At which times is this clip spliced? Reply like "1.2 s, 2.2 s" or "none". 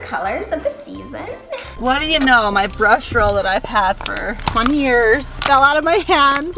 1.7 s, 4.4 s, 5.3 s

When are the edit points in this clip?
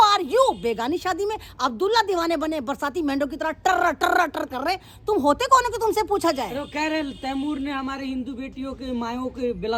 none

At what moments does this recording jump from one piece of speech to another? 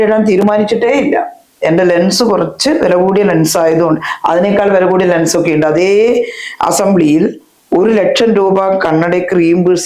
none

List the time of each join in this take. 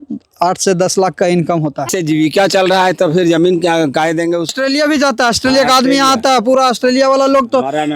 1.9 s, 4.5 s

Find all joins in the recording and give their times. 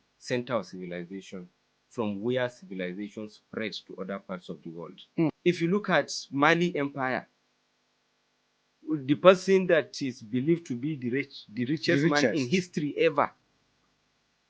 5.4 s

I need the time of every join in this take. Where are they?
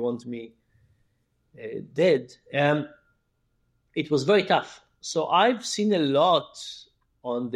none

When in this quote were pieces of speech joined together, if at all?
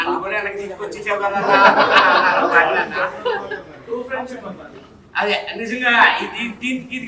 none

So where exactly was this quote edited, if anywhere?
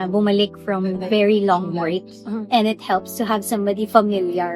1.0 s

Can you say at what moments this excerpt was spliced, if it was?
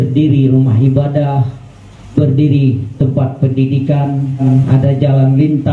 4.4 s

